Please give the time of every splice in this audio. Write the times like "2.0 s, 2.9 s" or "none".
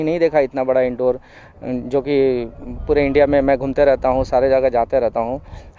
none